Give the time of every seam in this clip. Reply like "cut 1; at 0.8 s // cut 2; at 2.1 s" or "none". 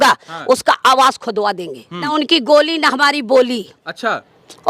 cut 1; at 2.1 s

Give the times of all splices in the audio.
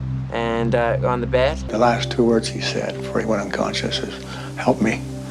cut 1; at 1.7 s

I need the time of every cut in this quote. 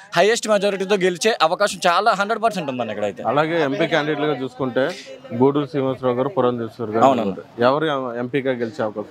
none

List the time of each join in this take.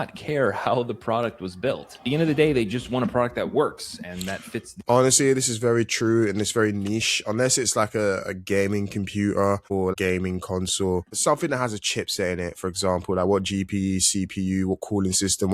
cut 1; at 9.9 s // cut 2; at 11.1 s

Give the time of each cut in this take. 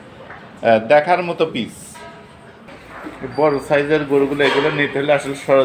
cut 1; at 2.5 s

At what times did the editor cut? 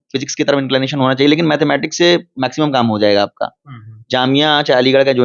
none

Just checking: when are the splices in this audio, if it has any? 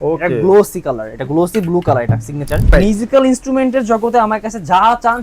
cut 1; at 2.7 s

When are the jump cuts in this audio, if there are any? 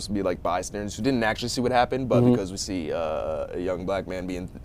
none

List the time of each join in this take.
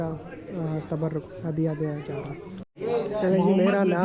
cut 1; at 2.6 s

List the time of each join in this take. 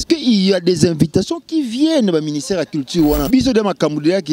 cut 1; at 3.3 s

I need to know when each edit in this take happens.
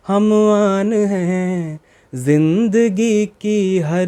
none

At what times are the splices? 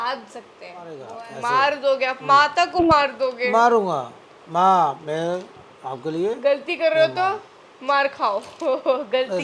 cut 1; at 1.1 s

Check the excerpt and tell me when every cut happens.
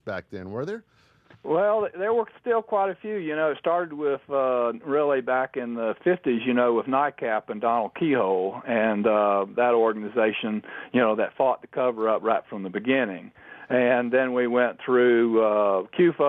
cut 1; at 7.9 s

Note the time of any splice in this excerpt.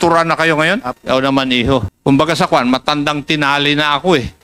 cut 1; at 0.9 s // cut 2; at 1.9 s

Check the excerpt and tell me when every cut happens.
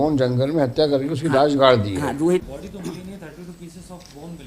cut 1; at 2.5 s

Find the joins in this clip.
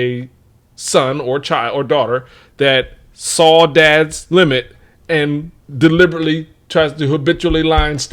none

